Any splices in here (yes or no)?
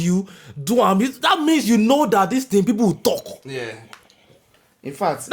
no